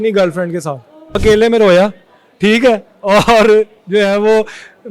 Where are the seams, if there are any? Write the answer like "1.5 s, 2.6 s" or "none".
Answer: 1.2 s